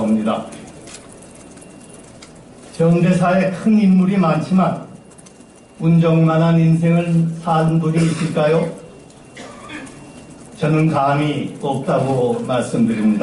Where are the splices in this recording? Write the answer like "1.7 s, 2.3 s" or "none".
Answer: 8.1 s